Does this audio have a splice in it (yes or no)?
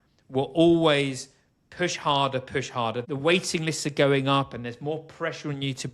yes